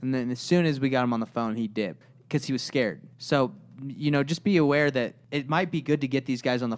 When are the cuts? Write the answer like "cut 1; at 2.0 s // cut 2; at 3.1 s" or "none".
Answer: cut 1; at 2.1 s // cut 2; at 3.1 s // cut 3; at 5.2 s